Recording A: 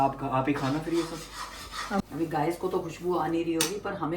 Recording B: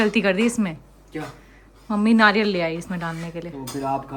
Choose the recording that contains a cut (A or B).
A